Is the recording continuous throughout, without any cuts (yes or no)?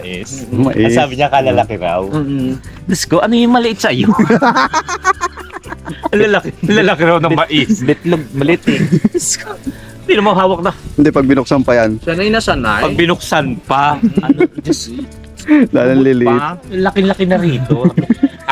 yes